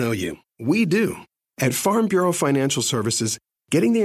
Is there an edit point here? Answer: yes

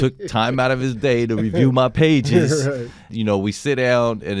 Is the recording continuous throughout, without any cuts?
no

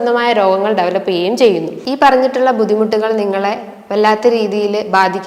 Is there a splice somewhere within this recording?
yes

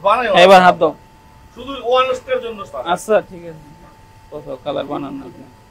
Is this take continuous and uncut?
yes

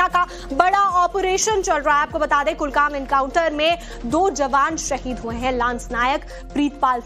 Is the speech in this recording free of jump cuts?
no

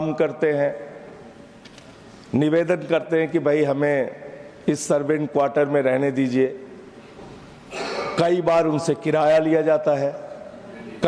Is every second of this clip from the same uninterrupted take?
yes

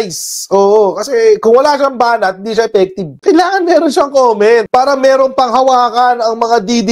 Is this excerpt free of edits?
yes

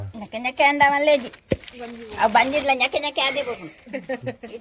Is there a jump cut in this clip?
no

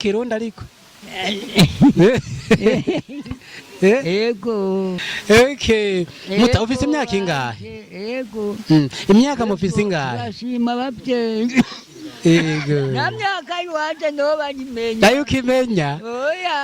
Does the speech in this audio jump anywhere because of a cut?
yes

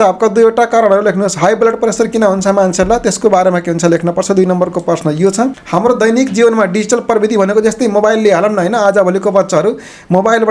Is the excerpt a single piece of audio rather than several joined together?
no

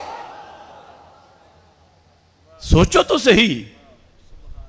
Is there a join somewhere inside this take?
no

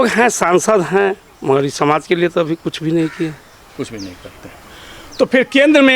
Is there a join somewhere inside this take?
no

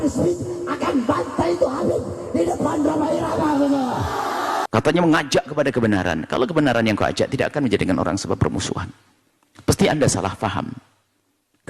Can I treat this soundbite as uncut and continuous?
no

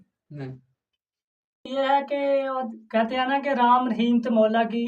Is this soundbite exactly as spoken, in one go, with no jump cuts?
no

